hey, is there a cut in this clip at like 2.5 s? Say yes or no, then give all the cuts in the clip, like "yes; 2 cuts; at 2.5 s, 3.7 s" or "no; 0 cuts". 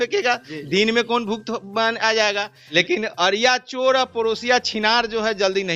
yes; 1 cut; at 2.5 s